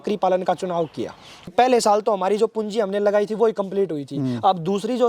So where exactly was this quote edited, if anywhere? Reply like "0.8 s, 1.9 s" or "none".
1.5 s